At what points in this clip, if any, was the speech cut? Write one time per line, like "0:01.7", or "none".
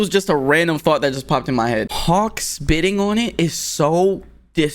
0:01.9

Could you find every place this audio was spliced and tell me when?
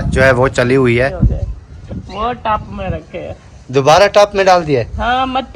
0:01.1

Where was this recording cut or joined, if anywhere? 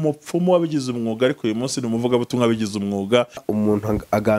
0:03.4

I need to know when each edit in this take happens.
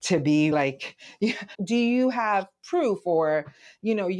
0:01.6

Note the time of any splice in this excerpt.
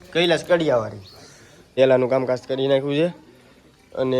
0:01.7

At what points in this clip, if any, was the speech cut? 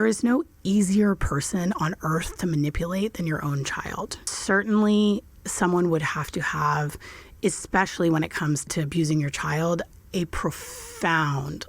0:04.3
0:08.7

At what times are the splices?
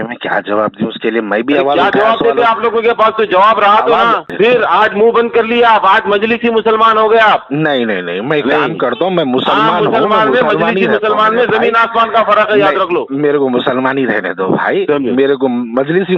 0:04.3

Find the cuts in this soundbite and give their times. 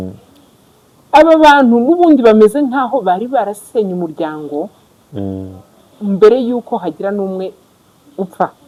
none

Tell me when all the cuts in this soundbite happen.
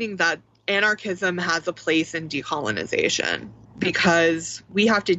none

